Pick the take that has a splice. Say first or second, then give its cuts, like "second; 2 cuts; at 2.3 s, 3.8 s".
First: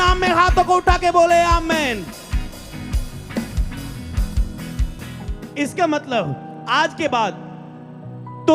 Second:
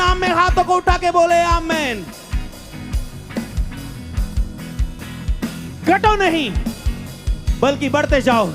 first; 1 cut; at 5.2 s